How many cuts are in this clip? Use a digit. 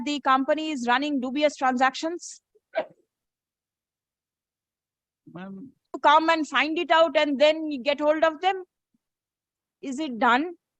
1